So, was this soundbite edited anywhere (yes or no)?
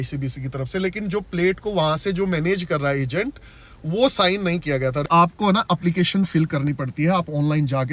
yes